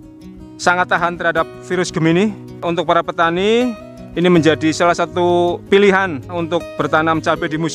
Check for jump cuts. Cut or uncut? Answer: cut